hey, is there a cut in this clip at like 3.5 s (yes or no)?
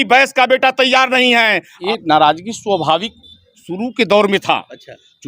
no